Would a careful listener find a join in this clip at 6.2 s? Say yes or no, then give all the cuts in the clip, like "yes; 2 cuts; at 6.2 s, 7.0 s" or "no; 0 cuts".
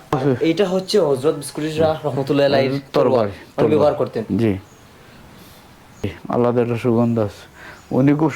yes; 1 cut; at 6.2 s